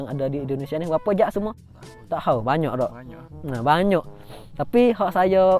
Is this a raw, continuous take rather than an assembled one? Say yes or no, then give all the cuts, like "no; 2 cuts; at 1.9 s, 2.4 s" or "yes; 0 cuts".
yes; 0 cuts